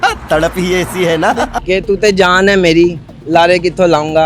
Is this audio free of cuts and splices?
no; 1 cut; at 1.6 s

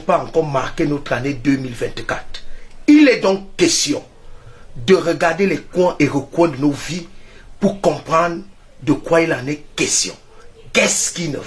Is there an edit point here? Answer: no; 0 cuts

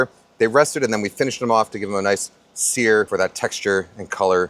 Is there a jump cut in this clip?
yes; 1 cut; at 3.1 s

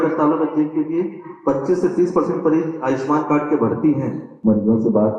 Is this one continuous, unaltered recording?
no; 1 cut; at 4.2 s

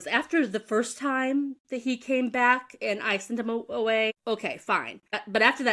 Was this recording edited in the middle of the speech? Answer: yes; 1 cut; at 4.8 s

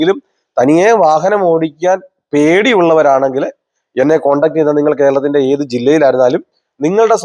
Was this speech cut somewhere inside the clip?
no; 0 cuts

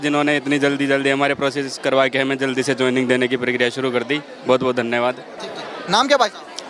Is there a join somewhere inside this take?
no; 0 cuts

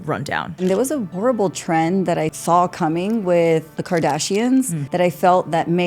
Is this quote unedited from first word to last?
no; 4 cuts; at 0.8 s, 2.4 s, 3.7 s, 4.8 s

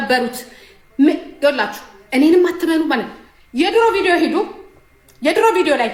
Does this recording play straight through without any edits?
yes; 0 cuts

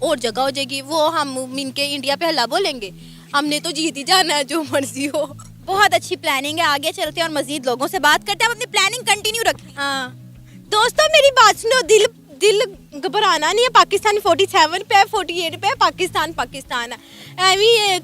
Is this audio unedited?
yes; 0 cuts

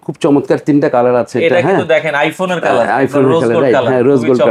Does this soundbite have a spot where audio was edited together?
no; 0 cuts

